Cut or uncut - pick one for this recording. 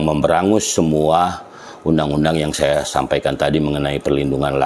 uncut